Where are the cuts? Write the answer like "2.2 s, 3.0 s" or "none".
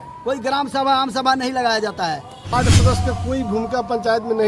2.5 s